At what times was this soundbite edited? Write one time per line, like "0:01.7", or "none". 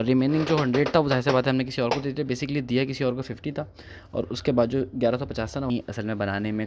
0:05.7